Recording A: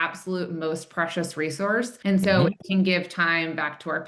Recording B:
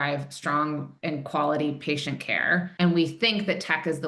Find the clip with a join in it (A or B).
A